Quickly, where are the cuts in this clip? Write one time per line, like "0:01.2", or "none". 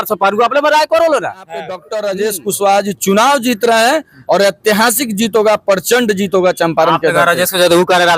0:01.8